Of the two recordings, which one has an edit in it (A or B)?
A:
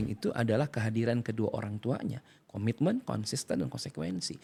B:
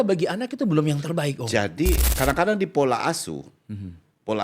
B